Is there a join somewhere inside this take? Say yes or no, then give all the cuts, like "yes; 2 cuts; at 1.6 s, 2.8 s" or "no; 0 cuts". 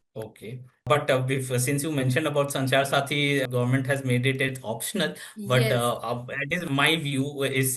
yes; 2 cuts; at 0.9 s, 3.4 s